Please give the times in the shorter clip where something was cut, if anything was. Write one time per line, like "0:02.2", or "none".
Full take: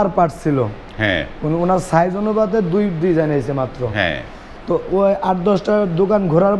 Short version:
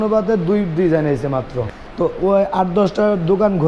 0:01.6